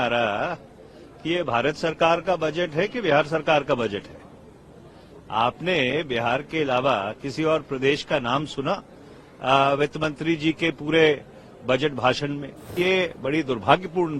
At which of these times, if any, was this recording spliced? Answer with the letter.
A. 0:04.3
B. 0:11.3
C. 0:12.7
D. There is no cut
C